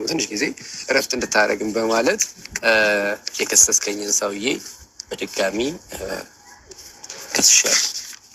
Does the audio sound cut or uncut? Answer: uncut